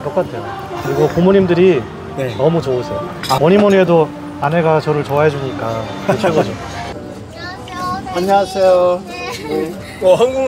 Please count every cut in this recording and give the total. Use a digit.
2